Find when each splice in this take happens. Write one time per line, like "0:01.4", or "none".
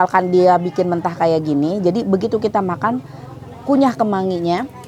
none